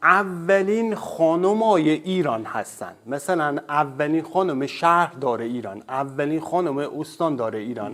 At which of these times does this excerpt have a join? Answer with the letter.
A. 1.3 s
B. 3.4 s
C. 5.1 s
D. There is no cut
D